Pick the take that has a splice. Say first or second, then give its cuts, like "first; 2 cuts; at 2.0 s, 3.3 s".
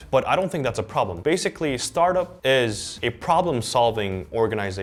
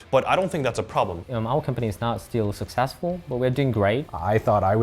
second; 2 cuts; at 1.2 s, 4.1 s